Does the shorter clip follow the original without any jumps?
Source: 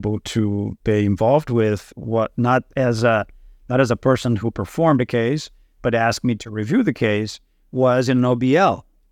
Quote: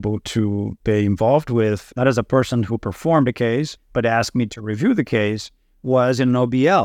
no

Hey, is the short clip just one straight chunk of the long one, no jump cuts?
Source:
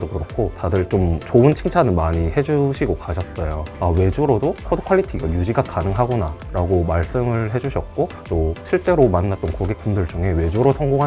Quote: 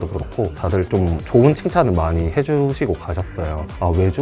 yes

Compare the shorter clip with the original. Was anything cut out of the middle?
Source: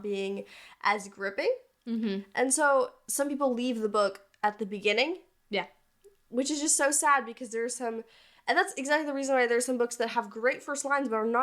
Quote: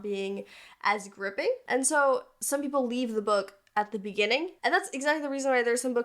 yes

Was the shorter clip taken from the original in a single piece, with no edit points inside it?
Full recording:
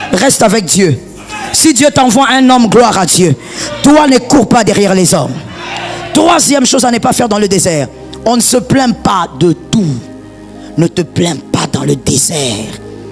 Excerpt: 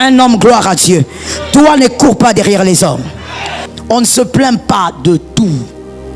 no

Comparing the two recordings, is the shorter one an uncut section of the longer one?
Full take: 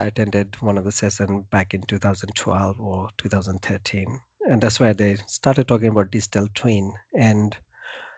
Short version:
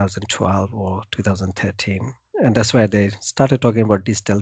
yes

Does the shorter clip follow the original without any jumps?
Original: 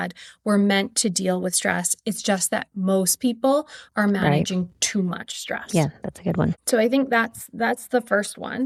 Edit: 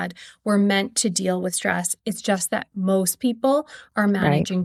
yes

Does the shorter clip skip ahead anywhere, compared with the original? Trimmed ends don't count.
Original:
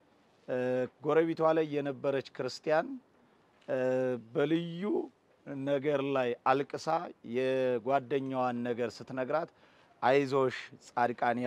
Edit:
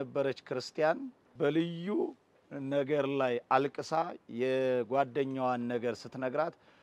yes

